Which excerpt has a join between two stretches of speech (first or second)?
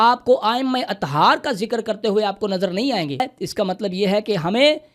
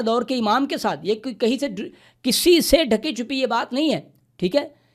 first